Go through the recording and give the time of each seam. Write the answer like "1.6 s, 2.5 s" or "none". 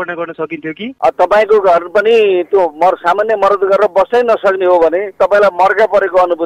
0.9 s, 5.1 s